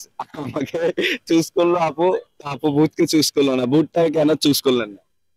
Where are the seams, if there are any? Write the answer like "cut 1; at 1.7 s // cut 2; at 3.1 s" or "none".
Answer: none